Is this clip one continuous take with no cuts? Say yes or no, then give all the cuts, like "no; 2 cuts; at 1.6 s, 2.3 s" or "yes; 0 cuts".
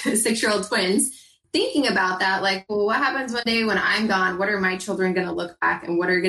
no; 1 cut; at 1.4 s